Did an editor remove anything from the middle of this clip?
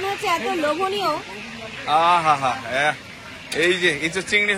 no; 0 cuts

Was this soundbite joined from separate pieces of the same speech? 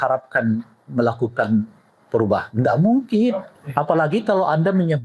yes; 1 cut; at 3.5 s

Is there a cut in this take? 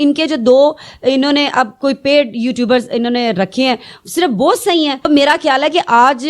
yes; 1 cut; at 5.0 s

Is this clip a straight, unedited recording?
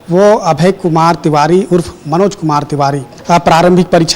no; 1 cut; at 3.1 s

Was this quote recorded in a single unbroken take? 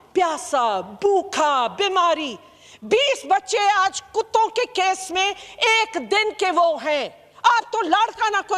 yes; 0 cuts

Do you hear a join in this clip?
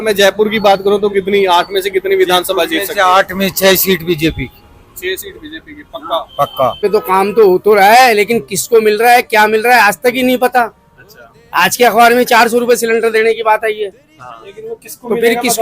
yes; 1 cut; at 6.8 s

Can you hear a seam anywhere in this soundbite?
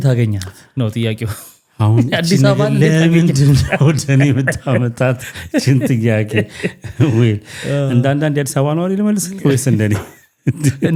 no; 0 cuts

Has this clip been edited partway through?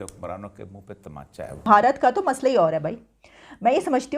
yes; 1 cut; at 1.6 s

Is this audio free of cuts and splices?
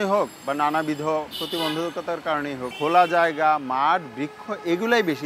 no; 1 cut; at 2.7 s

